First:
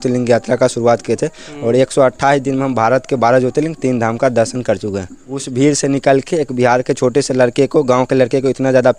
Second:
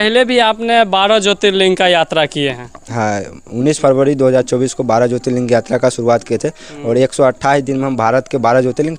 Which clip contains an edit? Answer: first; 1 cut; at 5.5 s

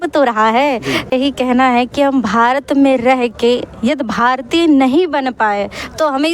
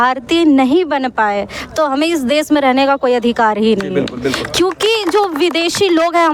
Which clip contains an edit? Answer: first; 1 cut; at 1.1 s

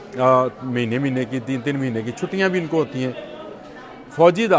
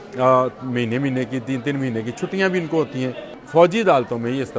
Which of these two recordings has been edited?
second; 1 cut; at 3.3 s

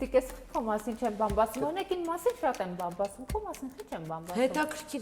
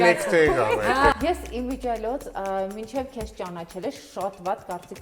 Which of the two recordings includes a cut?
second; 1 cut; at 1.1 s

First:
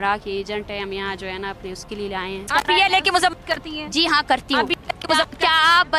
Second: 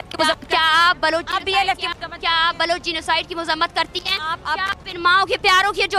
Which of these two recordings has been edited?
first; 1 cut; at 2.5 s

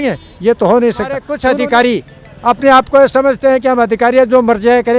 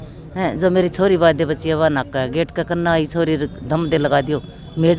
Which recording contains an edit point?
first; 1 cut; at 1.3 s

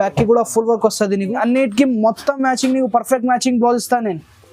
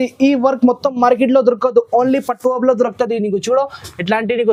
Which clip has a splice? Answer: first; 1 cut; at 1.4 s

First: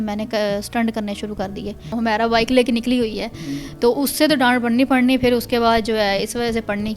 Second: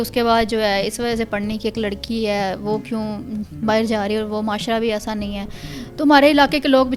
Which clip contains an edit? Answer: first; 1 cut; at 1.9 s

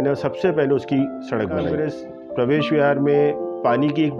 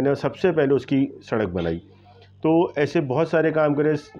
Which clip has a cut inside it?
first; 1 cut; at 1.7 s

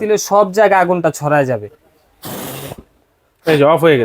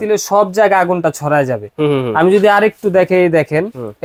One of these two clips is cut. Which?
first; 1 cut; at 1.7 s

